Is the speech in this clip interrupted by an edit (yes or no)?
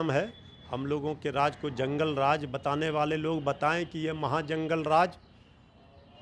no